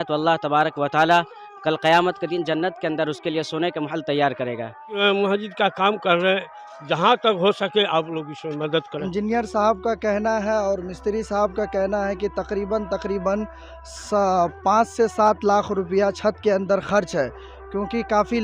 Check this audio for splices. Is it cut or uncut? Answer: cut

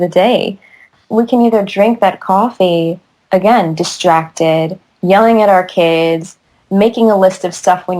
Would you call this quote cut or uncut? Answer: cut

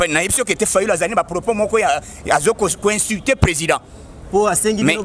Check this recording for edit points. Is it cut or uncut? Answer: uncut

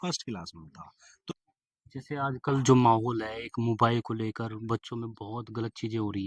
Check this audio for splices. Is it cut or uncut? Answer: cut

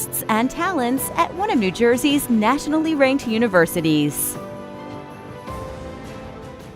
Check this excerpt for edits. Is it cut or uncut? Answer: cut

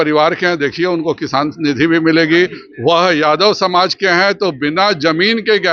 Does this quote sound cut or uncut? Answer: uncut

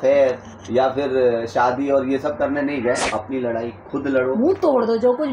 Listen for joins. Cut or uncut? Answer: cut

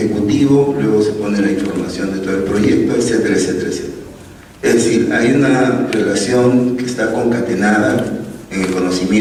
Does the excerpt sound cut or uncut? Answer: uncut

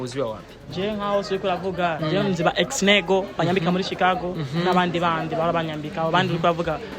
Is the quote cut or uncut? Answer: uncut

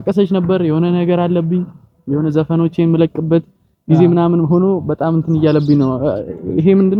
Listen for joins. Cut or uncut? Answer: uncut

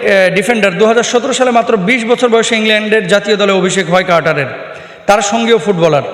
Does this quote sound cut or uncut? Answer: uncut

